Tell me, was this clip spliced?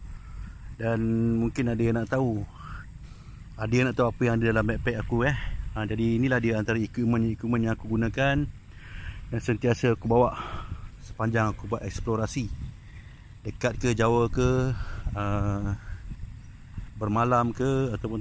no; 0 cuts

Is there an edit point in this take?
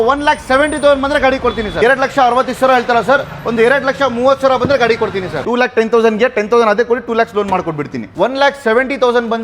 yes; 3 cuts; at 1.7 s, 5.4 s, 8.0 s

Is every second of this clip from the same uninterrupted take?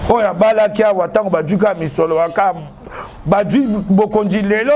yes; 0 cuts

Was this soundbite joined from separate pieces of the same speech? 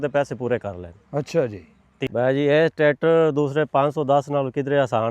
yes; 1 cut; at 2.1 s

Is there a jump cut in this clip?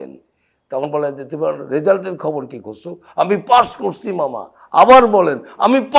no; 0 cuts

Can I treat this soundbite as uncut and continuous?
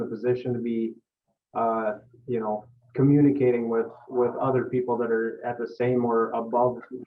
yes; 0 cuts

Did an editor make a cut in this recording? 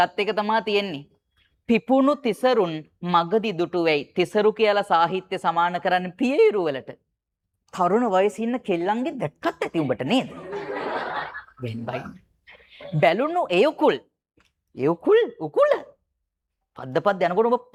no; 0 cuts

